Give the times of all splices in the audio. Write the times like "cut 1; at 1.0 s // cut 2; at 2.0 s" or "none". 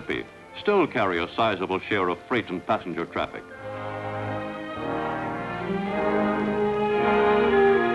cut 1; at 1.2 s